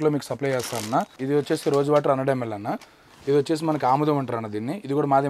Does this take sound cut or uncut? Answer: cut